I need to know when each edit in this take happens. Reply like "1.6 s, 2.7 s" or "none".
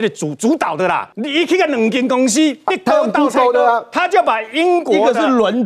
1.1 s

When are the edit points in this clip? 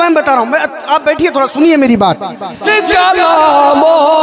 2.7 s

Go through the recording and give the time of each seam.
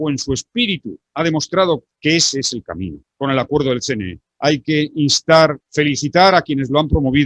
1.0 s, 1.9 s, 3.0 s, 4.2 s, 5.6 s

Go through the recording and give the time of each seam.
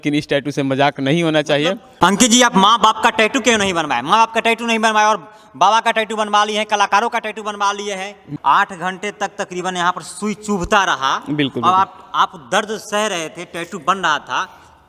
1.9 s, 8.2 s

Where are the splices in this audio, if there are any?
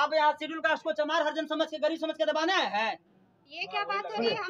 none

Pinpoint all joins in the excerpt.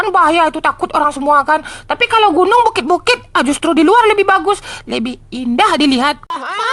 none

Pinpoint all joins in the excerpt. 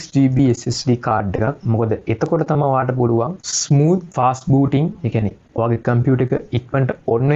none

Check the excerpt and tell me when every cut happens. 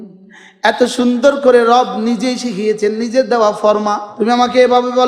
4.1 s

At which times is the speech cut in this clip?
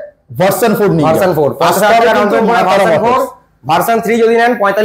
none

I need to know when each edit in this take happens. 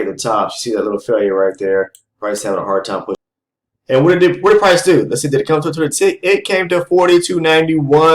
3.2 s

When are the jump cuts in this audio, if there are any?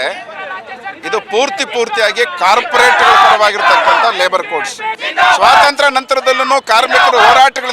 5.0 s

